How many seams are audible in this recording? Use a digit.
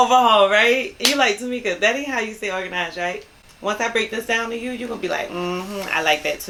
0